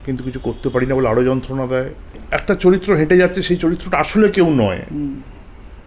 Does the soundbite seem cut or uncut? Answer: cut